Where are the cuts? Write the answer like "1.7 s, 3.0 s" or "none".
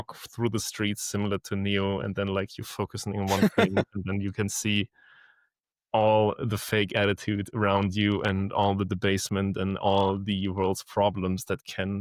none